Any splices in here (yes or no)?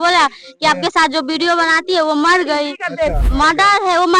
yes